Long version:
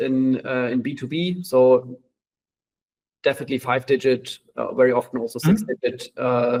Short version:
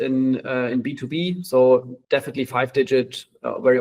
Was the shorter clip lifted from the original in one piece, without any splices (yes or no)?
no